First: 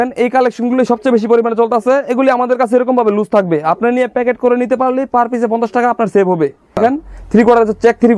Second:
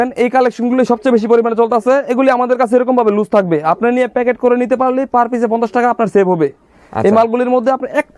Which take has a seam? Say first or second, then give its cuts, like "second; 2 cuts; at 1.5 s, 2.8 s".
first; 1 cut; at 6.8 s